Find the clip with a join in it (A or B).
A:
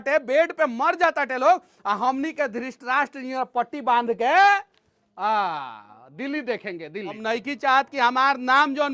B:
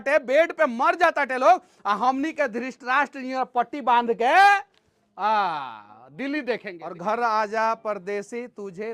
B